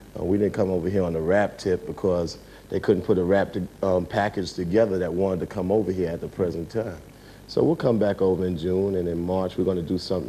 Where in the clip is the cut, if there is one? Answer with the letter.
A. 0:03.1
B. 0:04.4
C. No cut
B